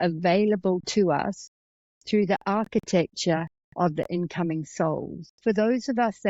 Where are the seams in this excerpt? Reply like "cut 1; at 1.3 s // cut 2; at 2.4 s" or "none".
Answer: cut 1; at 5.2 s